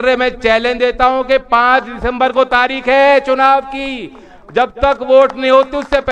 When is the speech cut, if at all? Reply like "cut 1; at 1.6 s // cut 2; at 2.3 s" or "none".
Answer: none